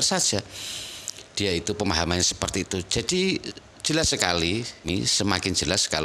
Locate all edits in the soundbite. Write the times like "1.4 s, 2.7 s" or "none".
4.9 s